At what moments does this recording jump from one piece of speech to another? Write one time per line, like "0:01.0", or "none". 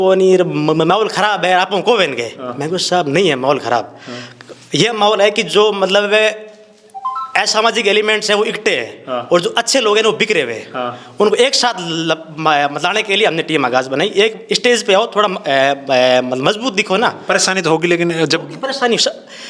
none